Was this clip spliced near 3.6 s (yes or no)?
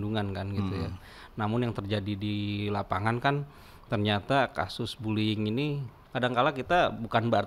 no